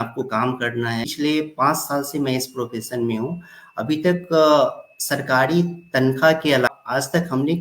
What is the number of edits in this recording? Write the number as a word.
two